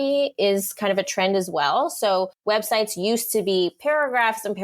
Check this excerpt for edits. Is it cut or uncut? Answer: cut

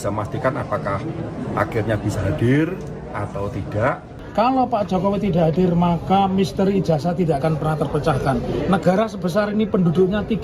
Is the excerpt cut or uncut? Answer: cut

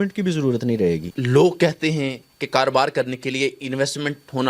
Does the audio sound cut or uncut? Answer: cut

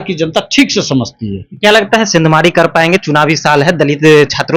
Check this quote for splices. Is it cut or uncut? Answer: uncut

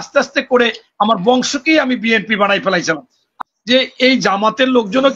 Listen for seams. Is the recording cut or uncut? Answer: cut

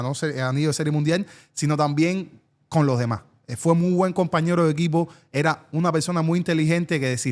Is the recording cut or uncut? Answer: uncut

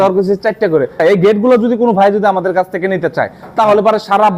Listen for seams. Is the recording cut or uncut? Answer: cut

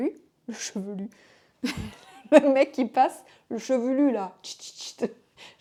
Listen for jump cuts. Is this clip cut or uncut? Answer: uncut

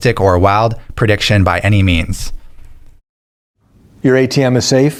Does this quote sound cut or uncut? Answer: uncut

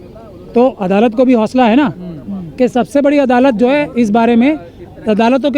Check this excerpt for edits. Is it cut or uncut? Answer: uncut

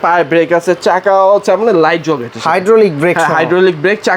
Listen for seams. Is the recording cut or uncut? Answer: uncut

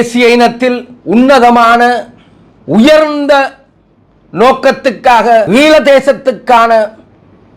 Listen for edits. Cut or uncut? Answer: cut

